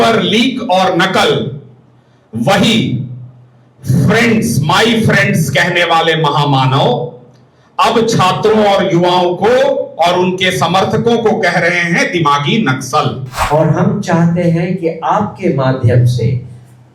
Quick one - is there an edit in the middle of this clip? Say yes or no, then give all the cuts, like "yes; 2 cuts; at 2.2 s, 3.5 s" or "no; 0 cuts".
yes; 1 cut; at 13.3 s